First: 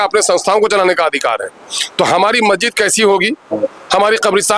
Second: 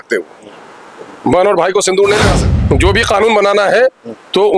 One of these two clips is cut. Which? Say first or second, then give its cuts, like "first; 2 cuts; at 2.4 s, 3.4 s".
second; 1 cut; at 2.4 s